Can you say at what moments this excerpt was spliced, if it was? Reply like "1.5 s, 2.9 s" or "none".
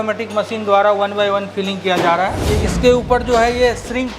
2.4 s